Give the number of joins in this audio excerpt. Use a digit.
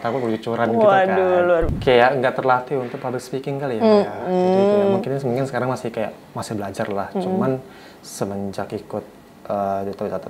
1